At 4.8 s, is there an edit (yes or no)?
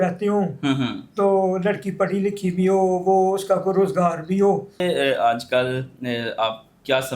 yes